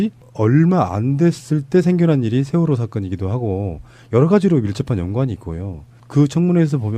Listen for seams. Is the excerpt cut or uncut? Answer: uncut